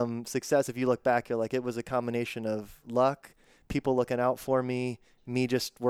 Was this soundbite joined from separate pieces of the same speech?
no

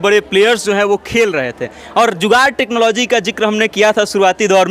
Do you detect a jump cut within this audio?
no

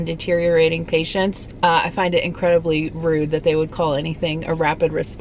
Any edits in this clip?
yes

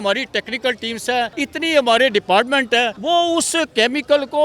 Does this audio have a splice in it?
yes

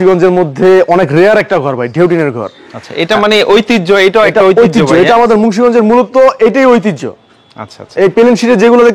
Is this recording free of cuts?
yes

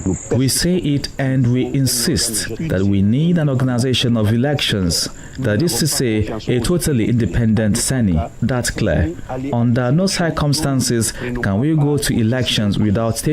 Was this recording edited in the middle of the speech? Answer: yes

